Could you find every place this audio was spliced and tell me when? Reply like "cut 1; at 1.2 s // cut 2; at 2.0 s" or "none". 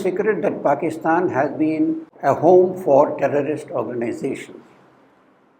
cut 1; at 2.1 s